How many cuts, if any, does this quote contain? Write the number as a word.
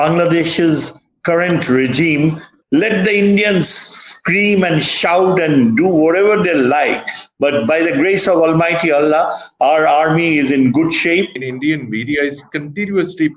two